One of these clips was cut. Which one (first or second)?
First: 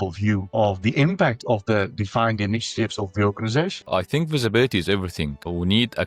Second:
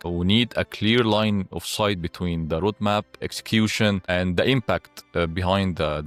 first